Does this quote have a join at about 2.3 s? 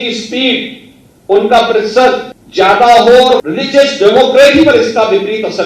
yes; 2 cuts; at 2.3 s, 3.5 s

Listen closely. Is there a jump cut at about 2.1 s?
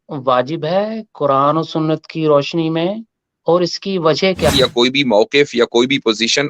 no; 1 cut; at 4.5 s

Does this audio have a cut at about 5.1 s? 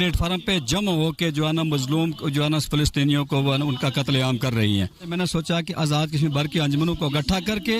yes; 1 cut; at 5.1 s

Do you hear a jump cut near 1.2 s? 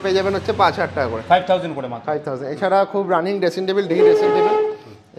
no; 0 cuts

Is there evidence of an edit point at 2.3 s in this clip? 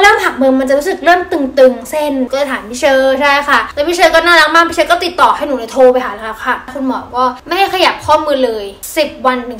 yes; 2 cuts; at 2.3 s, 6.7 s

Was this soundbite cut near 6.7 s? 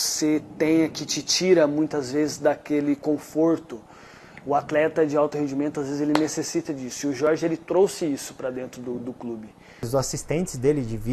no; 1 cut; at 9.9 s

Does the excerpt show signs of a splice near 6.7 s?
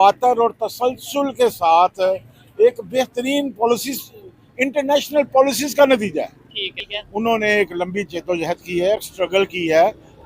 yes; 1 cut; at 6.7 s

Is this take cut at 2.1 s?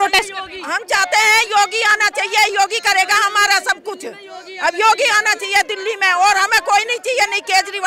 no; 0 cuts

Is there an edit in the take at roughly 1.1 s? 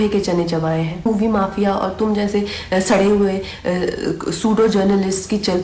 yes; 1 cut; at 1.1 s

